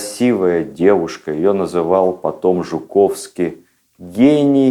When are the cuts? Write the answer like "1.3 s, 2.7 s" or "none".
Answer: none

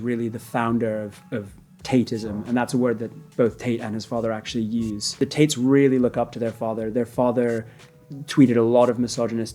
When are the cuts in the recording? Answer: 5.2 s

